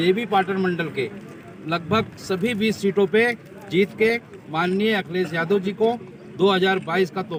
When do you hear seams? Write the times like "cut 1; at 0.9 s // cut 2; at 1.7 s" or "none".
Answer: none

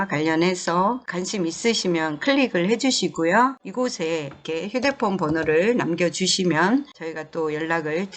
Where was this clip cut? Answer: cut 1; at 1.1 s

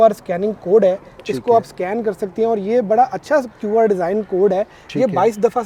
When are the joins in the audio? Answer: none

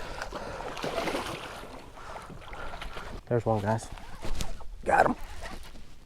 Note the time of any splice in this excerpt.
cut 1; at 3.2 s

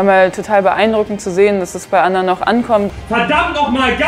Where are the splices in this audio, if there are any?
cut 1; at 2.9 s

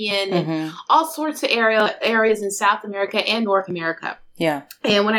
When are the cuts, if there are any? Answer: none

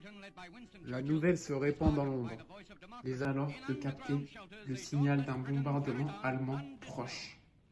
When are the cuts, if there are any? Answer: cut 1; at 3.2 s

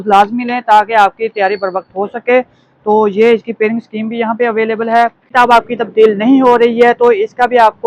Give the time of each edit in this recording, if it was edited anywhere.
cut 1; at 5.3 s

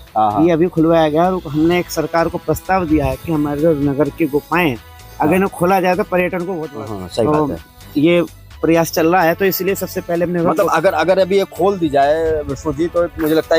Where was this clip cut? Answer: cut 1; at 6.6 s

